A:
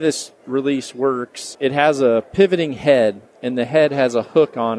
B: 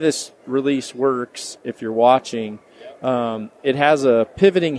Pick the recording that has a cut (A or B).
A